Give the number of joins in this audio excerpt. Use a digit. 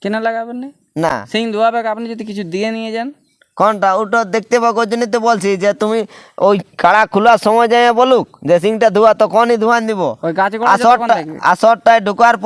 0